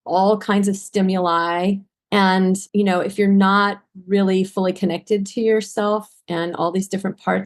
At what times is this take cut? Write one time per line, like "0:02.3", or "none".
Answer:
0:01.9
0:02.6